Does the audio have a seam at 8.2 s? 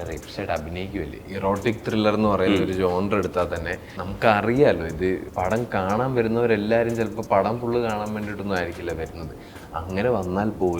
no; 3 cuts; at 1.2 s, 4.0 s, 5.2 s

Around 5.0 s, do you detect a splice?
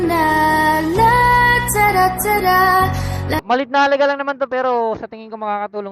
no; 1 cut; at 3.4 s

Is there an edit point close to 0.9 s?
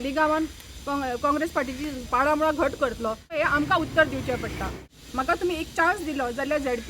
no; 2 cuts; at 3.4 s, 4.8 s

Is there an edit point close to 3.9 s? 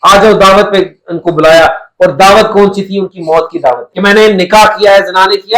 yes; 1 cut; at 3.9 s

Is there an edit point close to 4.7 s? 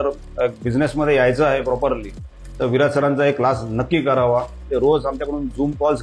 yes; 1 cut; at 4.7 s

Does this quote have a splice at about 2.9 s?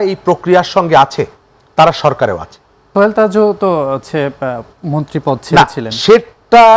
yes; 1 cut; at 2.9 s

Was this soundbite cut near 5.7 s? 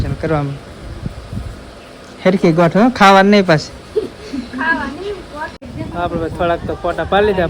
yes; 1 cut; at 5.7 s

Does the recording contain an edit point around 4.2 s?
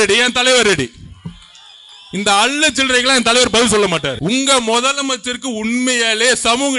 yes; 1 cut; at 4.2 s

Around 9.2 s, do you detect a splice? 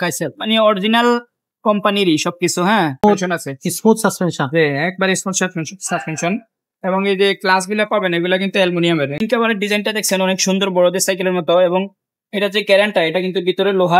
yes; 2 cuts; at 3.0 s, 9.2 s

